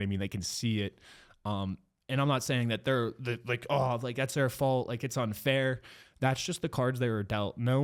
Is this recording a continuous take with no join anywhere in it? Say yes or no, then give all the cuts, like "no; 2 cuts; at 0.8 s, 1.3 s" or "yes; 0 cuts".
yes; 0 cuts